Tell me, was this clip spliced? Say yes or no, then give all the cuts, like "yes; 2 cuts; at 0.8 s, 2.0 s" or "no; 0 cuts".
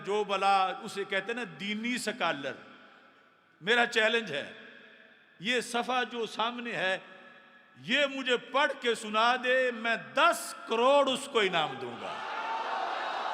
no; 0 cuts